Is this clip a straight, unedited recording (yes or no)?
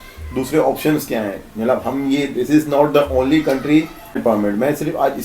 no